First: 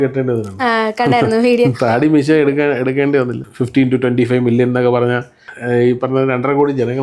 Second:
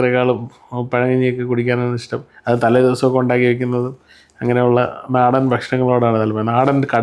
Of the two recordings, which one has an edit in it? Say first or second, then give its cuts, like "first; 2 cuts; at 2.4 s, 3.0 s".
first; 2 cuts; at 3.4 s, 5.5 s